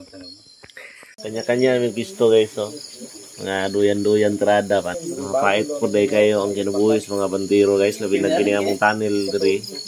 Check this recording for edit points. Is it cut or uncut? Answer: cut